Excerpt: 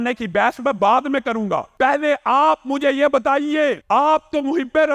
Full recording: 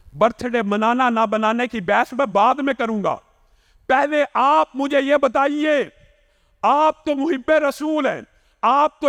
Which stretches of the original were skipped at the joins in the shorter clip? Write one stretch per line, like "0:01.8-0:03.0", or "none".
0:03.2-0:03.8
0:05.9-0:06.5